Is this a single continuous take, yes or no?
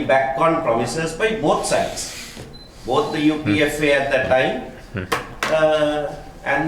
yes